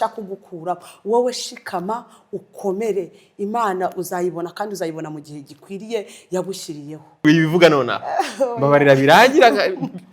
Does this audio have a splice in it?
yes; 1 cut; at 7.2 s

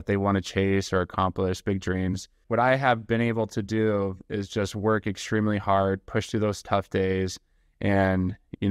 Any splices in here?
yes; 1 cut; at 2.4 s

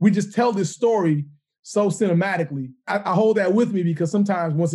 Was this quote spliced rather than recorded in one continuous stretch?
yes; 1 cut; at 2.9 s

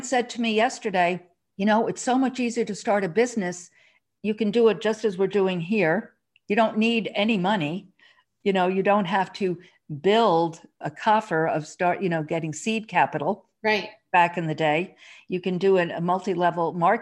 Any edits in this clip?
no; 0 cuts

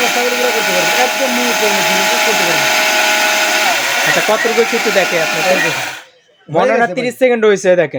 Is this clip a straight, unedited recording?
yes; 0 cuts

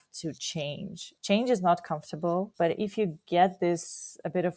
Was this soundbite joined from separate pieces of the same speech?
yes; 2 cuts; at 1.1 s, 2.5 s

